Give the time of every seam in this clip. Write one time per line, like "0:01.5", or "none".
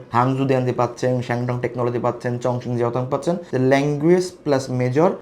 0:03.5